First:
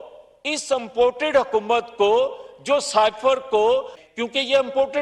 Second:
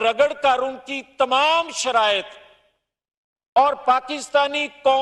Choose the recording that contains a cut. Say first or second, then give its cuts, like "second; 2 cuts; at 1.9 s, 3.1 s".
first; 1 cut; at 4.1 s